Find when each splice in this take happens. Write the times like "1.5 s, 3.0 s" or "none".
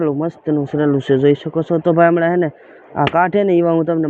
none